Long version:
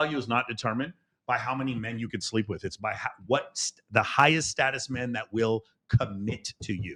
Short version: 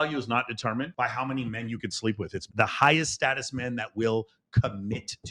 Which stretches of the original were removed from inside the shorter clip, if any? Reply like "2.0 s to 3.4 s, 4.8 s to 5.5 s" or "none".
0.9 s to 1.2 s, 2.7 s to 3.8 s